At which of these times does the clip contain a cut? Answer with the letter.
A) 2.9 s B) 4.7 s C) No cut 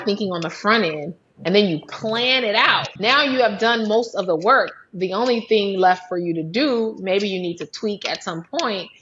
A